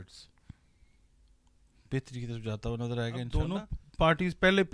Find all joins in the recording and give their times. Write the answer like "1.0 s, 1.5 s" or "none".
3.4 s